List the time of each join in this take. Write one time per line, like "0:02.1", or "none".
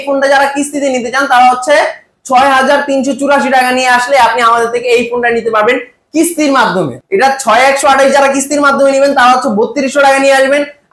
0:07.0